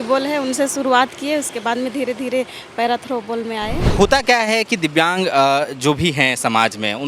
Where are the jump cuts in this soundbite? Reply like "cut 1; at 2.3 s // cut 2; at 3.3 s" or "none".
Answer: cut 1; at 3.8 s